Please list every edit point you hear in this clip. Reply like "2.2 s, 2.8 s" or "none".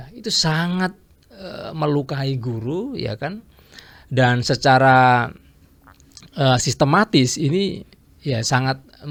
none